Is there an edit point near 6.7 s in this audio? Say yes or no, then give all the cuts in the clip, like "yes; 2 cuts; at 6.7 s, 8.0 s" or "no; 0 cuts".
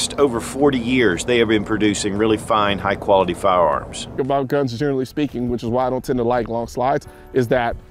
no; 1 cut; at 4.2 s